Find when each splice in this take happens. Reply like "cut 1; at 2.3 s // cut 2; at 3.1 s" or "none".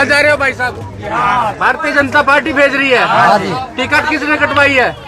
cut 1; at 1.6 s